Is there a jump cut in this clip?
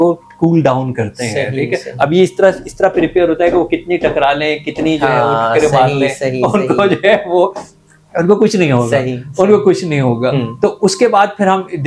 no; 0 cuts

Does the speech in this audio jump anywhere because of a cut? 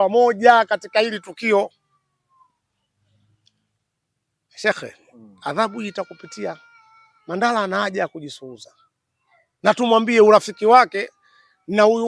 no; 0 cuts

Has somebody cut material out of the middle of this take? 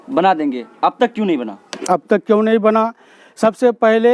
no; 0 cuts

